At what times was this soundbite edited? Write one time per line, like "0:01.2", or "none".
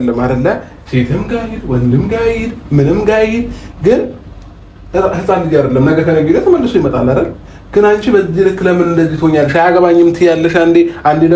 none